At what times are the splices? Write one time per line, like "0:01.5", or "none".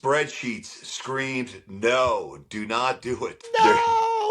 0:03.4